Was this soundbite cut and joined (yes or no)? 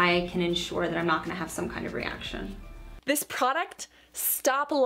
yes